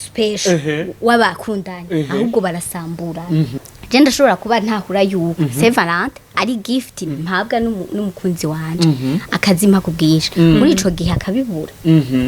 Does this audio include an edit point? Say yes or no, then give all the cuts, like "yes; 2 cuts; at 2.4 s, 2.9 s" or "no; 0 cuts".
yes; 1 cut; at 3.6 s